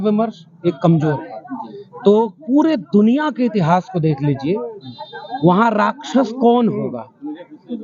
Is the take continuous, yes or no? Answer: yes